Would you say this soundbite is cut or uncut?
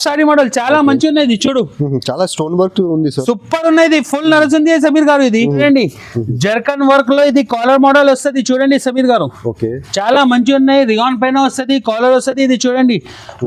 cut